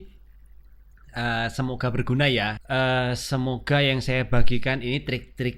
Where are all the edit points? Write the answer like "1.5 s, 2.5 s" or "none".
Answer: 2.6 s